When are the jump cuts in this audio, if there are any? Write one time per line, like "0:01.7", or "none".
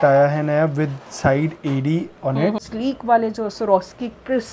0:02.7